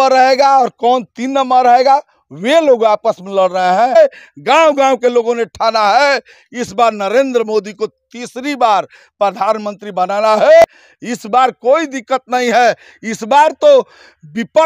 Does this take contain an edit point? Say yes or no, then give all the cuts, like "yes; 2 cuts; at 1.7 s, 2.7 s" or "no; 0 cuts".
yes; 2 cuts; at 4.0 s, 10.6 s